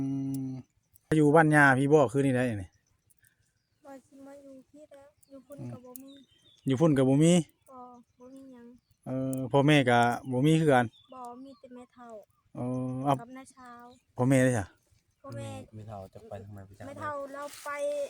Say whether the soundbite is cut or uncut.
cut